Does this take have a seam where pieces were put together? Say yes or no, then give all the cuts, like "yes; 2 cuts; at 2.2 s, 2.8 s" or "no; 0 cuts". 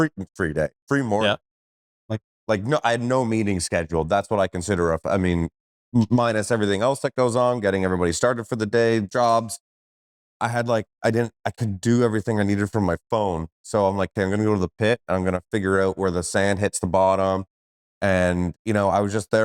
no; 0 cuts